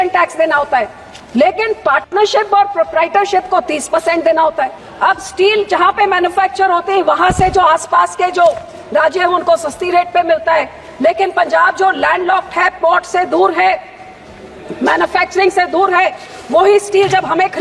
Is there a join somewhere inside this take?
yes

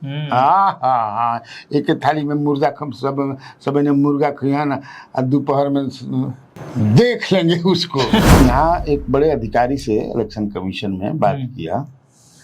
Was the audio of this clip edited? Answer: yes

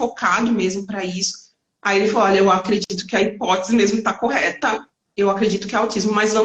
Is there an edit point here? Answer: no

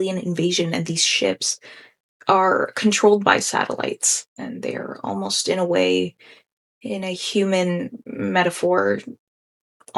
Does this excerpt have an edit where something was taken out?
no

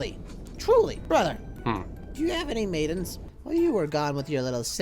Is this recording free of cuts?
no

